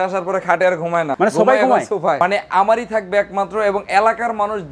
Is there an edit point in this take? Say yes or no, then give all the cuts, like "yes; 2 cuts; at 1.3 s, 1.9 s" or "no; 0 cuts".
yes; 2 cuts; at 1.1 s, 2.2 s